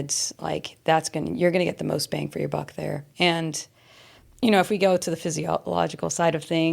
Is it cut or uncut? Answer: cut